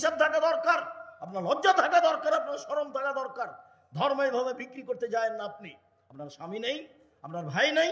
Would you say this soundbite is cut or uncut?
uncut